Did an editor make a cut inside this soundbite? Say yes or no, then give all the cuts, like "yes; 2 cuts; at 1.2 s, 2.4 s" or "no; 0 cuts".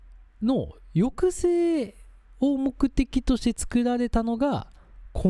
no; 0 cuts